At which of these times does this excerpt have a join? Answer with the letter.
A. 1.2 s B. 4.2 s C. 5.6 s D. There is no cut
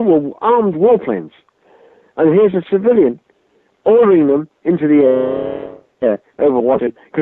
B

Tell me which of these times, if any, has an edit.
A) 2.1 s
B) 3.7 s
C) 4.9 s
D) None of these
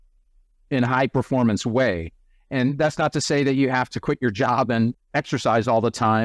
C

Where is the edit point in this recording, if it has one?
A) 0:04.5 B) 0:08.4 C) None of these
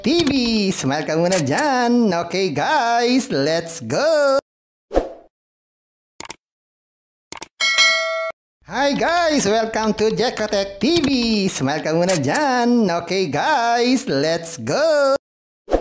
B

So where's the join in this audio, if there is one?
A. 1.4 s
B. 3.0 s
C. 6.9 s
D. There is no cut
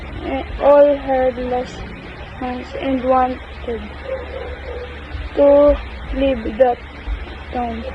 B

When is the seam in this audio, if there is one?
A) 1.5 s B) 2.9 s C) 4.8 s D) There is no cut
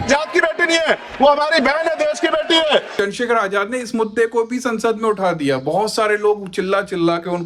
B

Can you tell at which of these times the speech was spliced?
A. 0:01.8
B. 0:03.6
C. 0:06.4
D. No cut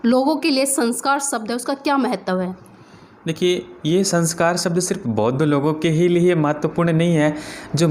D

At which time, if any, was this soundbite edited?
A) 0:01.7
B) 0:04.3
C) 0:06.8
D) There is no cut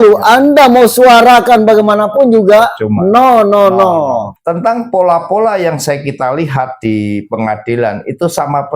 B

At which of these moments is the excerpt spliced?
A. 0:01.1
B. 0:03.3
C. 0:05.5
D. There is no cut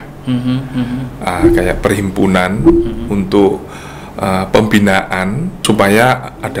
C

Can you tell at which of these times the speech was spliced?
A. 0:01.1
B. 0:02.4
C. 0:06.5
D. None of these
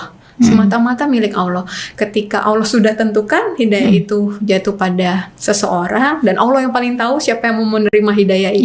D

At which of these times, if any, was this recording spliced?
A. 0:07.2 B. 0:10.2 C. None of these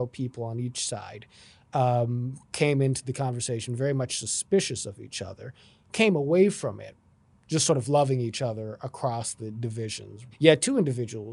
B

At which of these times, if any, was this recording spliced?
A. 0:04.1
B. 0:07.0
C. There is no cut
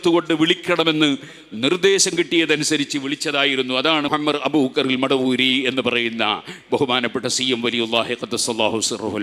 A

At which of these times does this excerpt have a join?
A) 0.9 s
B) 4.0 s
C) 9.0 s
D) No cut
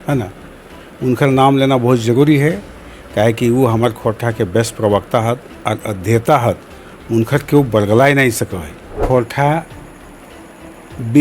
C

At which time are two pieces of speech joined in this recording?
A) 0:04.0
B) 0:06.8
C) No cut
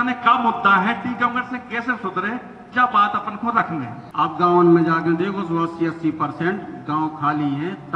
A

